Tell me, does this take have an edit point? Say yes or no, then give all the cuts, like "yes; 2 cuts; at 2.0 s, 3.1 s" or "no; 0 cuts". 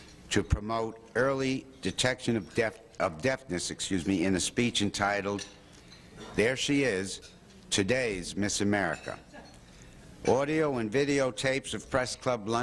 yes; 1 cut; at 4.7 s